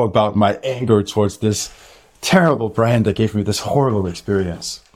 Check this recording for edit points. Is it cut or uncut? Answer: uncut